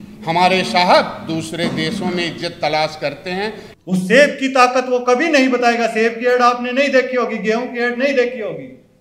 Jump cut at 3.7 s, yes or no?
yes